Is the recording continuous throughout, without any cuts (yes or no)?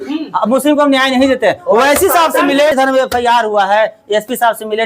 no